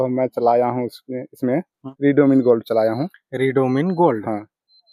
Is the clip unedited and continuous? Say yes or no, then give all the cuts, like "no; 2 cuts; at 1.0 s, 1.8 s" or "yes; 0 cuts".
yes; 0 cuts